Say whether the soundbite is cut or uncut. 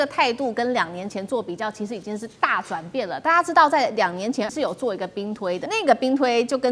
cut